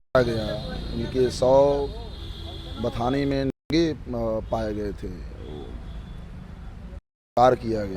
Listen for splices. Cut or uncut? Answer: uncut